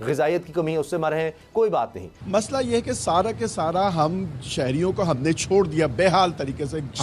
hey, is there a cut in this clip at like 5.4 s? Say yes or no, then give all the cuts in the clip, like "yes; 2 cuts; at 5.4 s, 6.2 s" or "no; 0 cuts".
no; 1 cut; at 2.1 s